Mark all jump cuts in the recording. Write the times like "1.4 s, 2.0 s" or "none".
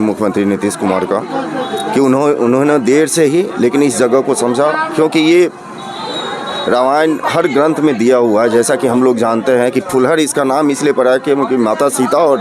none